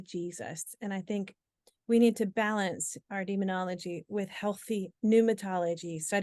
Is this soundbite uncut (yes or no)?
yes